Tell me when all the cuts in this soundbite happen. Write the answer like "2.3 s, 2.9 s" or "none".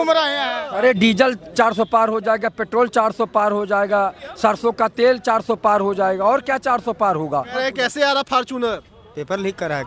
0.8 s, 7.5 s